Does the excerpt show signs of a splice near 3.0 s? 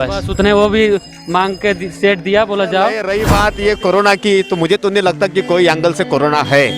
yes; 1 cut; at 3.0 s

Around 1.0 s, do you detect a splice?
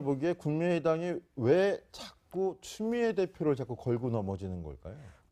yes; 1 cut; at 1.0 s

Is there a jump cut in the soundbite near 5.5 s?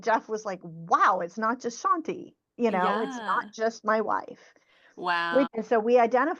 yes; 1 cut; at 5.5 s

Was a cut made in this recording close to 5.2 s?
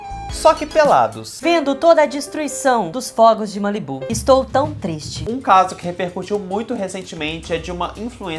yes; 1 cut; at 5.2 s

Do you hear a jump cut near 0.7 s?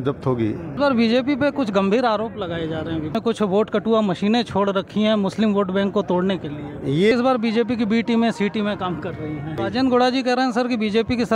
yes; 4 cuts; at 0.7 s, 3.1 s, 7.1 s, 9.6 s

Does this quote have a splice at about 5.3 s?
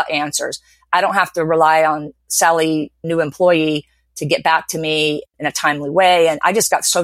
yes; 2 cuts; at 3.0 s, 5.3 s

